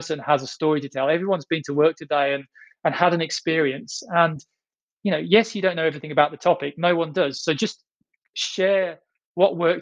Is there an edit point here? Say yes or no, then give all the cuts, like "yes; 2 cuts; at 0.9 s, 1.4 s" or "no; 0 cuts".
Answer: yes; 1 cut; at 4.9 s